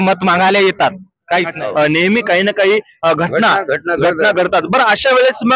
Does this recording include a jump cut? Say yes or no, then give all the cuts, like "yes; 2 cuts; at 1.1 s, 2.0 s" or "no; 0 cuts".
yes; 1 cut; at 1.6 s